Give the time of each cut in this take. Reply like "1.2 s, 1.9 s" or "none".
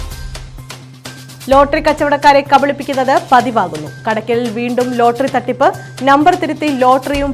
1.0 s